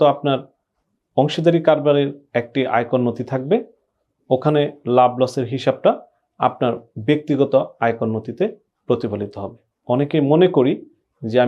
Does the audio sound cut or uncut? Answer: cut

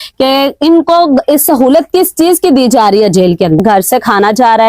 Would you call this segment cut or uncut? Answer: cut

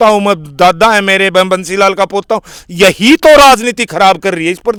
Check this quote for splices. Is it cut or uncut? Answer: uncut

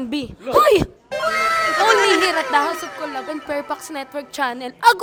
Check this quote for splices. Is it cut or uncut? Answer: uncut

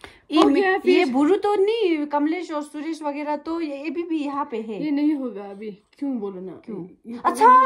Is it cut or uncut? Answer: uncut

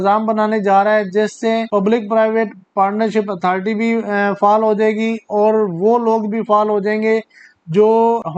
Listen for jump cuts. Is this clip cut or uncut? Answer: cut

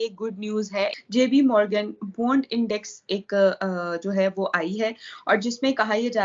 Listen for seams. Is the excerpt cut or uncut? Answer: cut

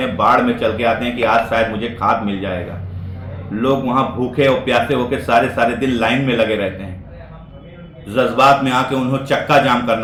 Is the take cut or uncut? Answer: uncut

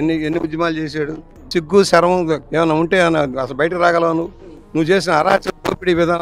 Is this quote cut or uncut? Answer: cut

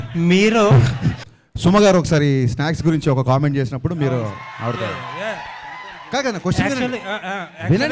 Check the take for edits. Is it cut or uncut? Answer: cut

